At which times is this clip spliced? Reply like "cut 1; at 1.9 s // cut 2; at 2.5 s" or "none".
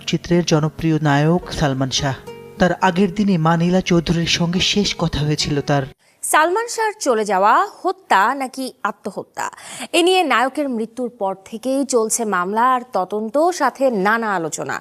cut 1; at 6.1 s